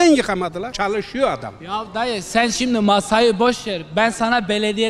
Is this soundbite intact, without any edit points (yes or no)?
yes